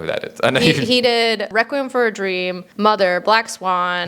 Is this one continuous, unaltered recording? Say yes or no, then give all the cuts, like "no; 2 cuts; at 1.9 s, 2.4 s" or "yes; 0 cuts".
no; 2 cuts; at 1.5 s, 2.6 s